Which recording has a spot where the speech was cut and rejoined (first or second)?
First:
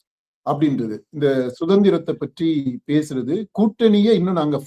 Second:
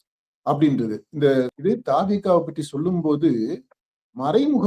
second